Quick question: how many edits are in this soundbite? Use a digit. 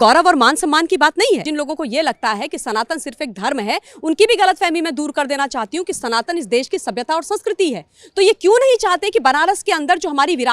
1